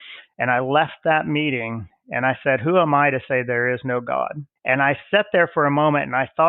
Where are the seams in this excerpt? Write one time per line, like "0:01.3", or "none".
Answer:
0:04.5

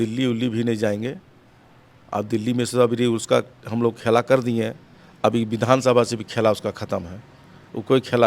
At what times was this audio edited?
none

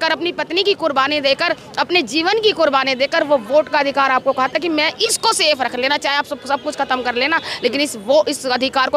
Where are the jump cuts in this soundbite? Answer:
none

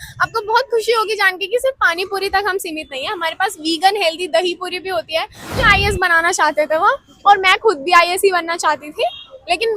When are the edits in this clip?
0:05.5

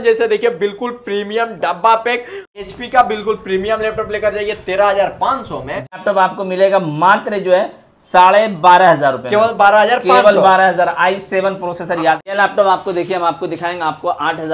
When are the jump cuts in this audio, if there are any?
0:02.5
0:06.0
0:12.2

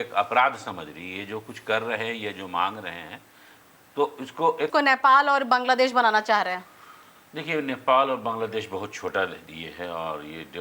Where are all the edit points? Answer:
none

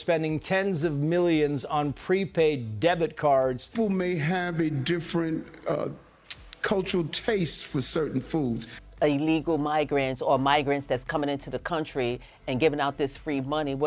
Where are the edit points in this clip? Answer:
0:03.6
0:08.7

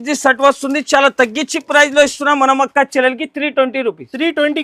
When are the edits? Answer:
none

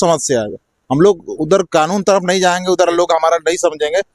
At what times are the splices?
none

